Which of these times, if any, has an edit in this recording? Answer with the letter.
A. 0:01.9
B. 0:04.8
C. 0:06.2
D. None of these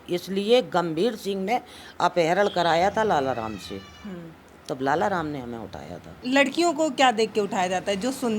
C